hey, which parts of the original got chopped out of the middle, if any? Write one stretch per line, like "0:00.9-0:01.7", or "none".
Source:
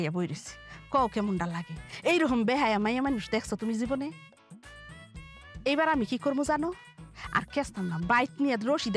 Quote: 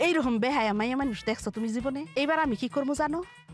0:04.1-0:05.6